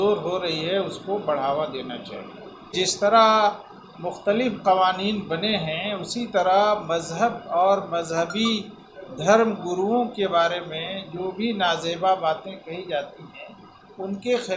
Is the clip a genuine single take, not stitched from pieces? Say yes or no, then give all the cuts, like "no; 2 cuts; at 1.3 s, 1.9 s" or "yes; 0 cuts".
no; 1 cut; at 2.7 s